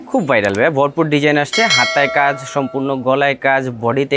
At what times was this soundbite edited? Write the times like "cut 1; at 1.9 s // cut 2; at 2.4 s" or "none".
none